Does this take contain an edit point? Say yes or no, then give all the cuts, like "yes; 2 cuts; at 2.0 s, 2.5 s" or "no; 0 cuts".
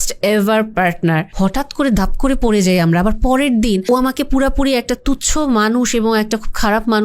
yes; 2 cuts; at 1.3 s, 3.8 s